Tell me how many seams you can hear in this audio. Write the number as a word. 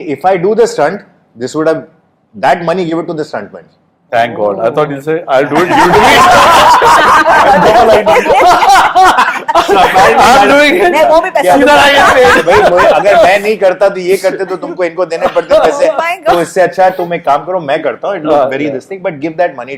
zero